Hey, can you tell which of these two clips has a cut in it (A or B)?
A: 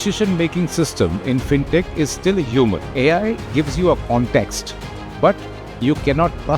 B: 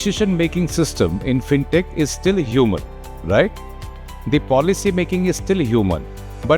A